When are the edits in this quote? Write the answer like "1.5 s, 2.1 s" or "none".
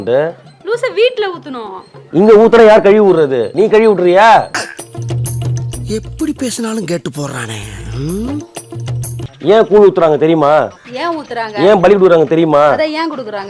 9.2 s

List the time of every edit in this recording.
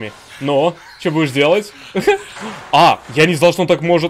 3.1 s

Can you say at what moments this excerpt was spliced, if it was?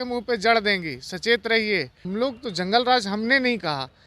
2.0 s

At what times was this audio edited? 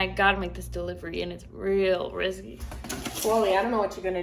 none

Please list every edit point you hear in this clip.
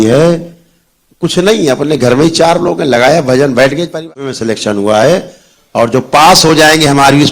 4.2 s

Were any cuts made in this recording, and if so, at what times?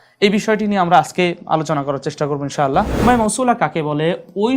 3.0 s

